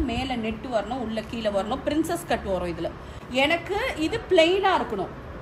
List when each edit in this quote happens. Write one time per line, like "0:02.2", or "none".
0:03.1